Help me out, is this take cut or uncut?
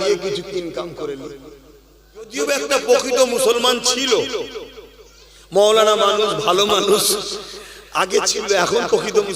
cut